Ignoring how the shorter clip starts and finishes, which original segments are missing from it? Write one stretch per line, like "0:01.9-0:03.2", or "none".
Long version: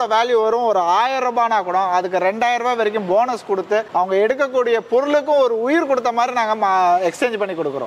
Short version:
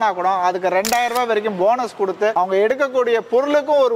0:03.8-0:03.9